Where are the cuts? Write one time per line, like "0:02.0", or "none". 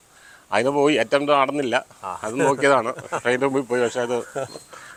none

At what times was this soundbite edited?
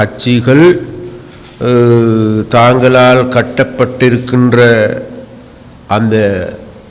none

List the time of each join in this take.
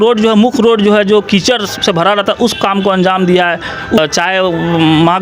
0:04.0

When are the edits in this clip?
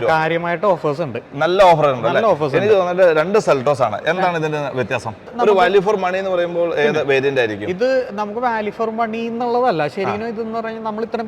0:05.3

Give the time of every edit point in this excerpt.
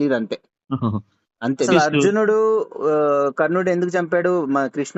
0:01.6

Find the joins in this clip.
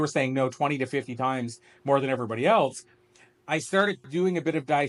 none

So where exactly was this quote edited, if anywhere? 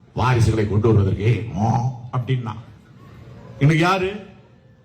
none

